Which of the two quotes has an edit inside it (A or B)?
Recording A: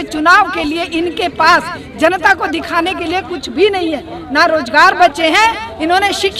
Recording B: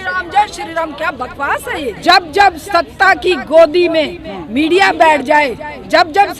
B